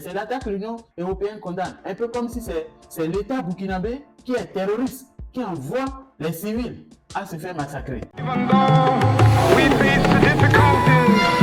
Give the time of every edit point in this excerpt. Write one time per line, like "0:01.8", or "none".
0:08.1

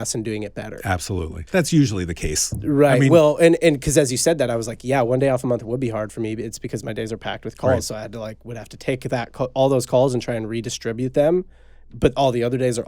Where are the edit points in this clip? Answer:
0:01.4

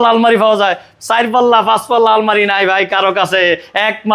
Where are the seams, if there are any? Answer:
none

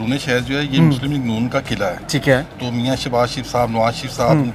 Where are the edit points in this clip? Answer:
none

